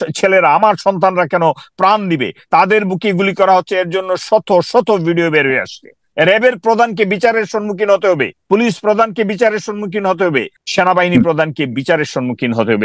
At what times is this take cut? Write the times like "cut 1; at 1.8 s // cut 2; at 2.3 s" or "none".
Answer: cut 1; at 8.3 s // cut 2; at 10.6 s